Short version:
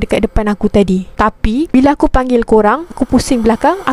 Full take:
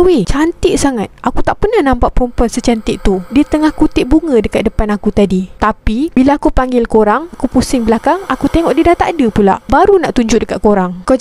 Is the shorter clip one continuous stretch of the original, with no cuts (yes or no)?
yes